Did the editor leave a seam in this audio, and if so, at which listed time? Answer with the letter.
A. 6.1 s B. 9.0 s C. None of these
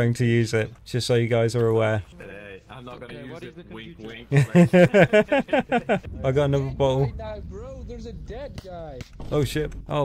A